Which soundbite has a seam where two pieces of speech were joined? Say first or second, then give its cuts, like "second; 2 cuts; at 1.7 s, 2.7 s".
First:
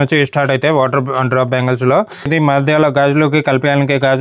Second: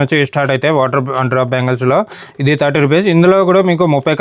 first; 1 cut; at 2.3 s